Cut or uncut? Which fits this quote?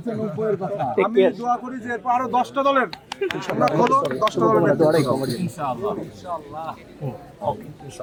uncut